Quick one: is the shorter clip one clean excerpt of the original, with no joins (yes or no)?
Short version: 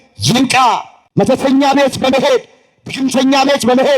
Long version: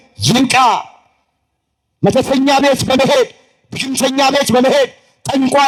no